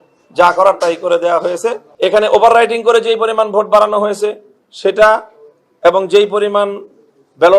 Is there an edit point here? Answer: yes; 1 cut; at 1.9 s

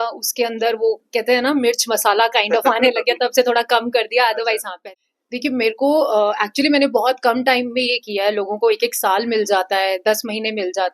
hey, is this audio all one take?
no; 1 cut; at 4.7 s

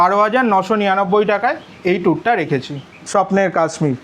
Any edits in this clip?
yes; 1 cut; at 3.0 s

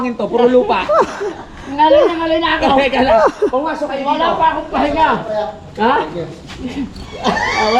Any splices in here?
no; 0 cuts

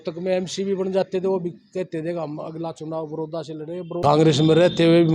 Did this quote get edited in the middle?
yes; 1 cut; at 4.0 s

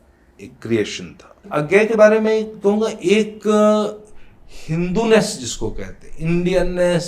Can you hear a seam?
yes; 1 cut; at 1.5 s

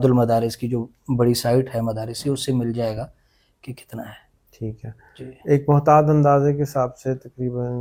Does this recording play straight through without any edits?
yes; 0 cuts

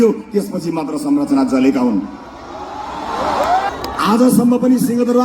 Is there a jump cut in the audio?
yes; 1 cut; at 3.7 s

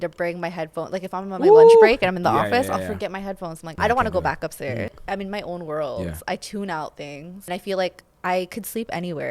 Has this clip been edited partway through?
yes; 3 cuts; at 3.7 s, 5.0 s, 7.5 s

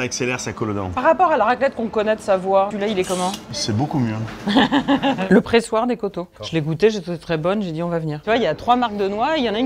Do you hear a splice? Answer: yes; 4 cuts; at 1.0 s, 2.9 s, 5.2 s, 8.2 s

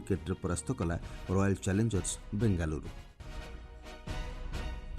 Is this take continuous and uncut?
no; 1 cut; at 3.5 s

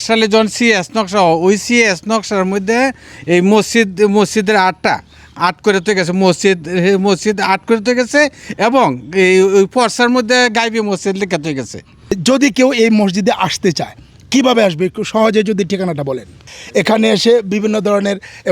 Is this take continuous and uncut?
no; 2 cuts; at 12.2 s, 16.5 s

